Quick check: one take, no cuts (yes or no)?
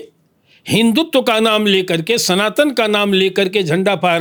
yes